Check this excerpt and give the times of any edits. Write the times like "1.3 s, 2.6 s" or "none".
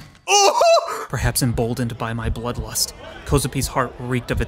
1.0 s